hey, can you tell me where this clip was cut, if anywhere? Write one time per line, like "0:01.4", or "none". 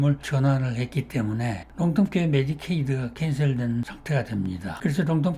0:01.6
0:04.2